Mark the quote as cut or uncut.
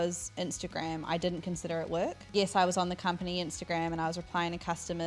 cut